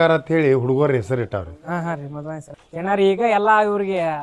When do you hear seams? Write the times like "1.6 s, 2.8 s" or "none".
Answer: 2.4 s